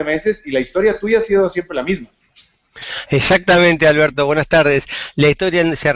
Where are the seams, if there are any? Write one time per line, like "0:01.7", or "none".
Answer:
0:04.1